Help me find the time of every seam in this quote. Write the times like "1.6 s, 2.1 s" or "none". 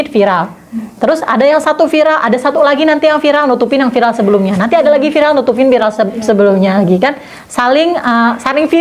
none